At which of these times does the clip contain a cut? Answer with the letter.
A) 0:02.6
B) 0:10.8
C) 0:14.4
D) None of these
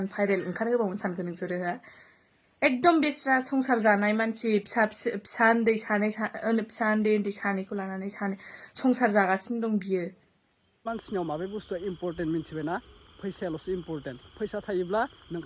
B